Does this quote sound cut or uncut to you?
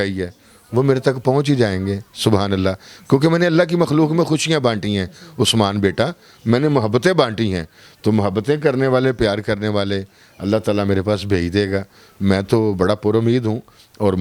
uncut